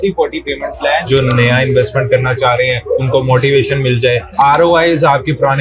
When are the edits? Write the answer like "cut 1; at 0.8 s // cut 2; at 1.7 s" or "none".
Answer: cut 1; at 1.1 s // cut 2; at 3.1 s